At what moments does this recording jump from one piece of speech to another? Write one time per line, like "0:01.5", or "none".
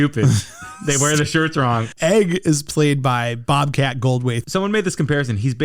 0:01.9
0:04.4